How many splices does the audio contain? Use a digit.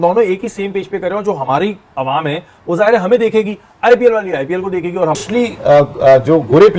1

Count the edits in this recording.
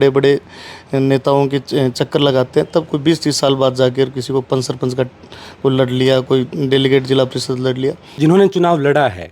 1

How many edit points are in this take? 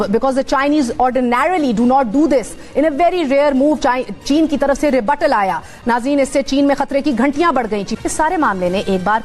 2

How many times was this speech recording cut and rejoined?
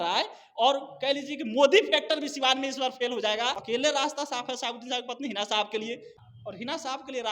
2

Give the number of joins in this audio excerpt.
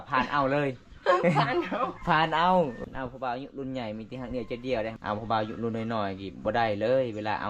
2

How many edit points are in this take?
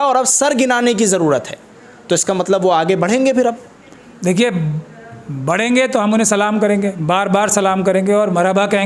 0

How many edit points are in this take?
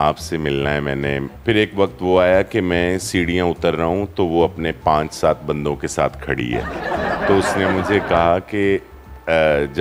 1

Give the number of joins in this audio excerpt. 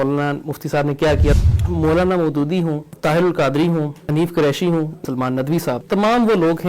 4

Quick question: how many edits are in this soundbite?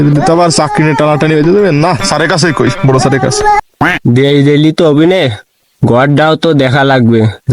1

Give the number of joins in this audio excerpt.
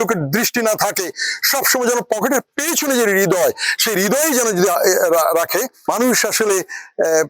1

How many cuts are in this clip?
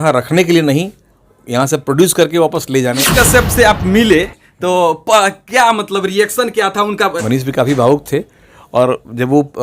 2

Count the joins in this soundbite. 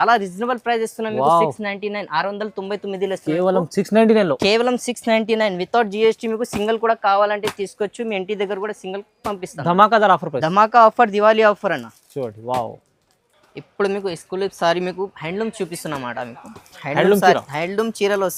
0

